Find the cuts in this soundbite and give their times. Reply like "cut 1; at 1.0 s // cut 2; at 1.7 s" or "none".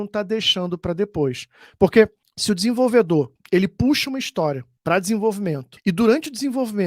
cut 1; at 2.3 s // cut 2; at 3.4 s // cut 3; at 4.7 s // cut 4; at 5.7 s